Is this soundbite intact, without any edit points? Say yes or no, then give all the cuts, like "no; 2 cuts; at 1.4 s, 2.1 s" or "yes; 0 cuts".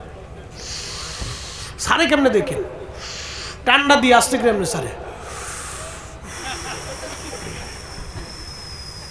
yes; 0 cuts